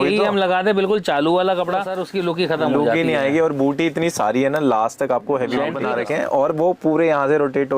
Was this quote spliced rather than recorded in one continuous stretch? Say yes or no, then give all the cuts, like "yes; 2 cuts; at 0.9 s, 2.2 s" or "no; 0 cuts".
yes; 2 cuts; at 1.7 s, 5.8 s